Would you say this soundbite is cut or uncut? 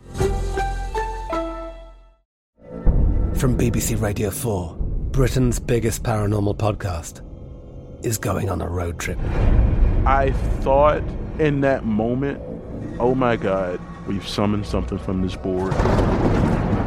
cut